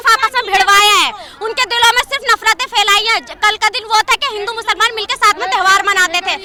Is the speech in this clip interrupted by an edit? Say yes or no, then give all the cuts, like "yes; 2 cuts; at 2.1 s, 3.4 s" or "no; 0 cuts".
no; 0 cuts